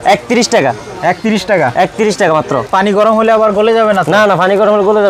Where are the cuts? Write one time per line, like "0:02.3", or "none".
0:02.7